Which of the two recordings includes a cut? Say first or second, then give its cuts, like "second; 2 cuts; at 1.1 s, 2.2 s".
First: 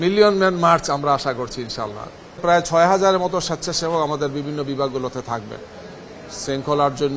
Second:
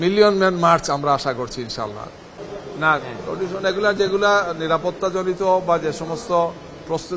first; 1 cut; at 2.4 s